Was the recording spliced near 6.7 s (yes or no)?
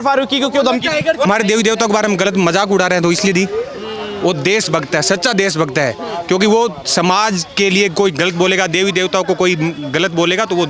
no